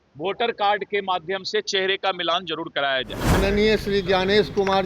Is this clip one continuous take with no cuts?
no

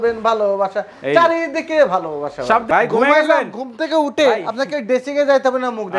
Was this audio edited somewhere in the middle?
yes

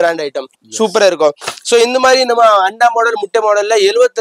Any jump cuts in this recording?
no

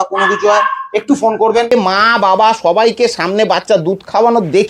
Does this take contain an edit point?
yes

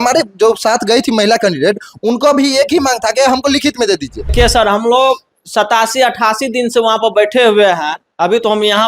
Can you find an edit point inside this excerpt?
yes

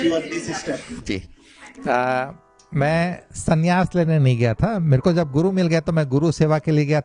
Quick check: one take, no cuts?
yes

